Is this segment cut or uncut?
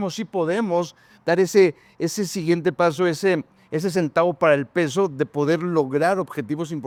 uncut